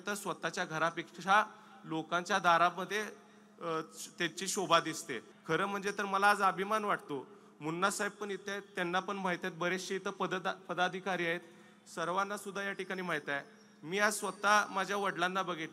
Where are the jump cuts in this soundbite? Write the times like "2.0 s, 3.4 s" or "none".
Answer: 5.3 s